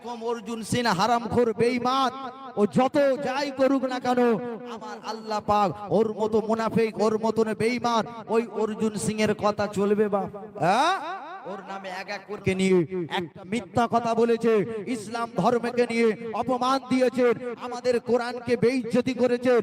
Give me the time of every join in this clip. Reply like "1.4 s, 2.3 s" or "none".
12.4 s, 13.9 s